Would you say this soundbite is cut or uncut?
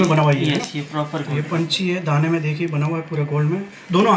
uncut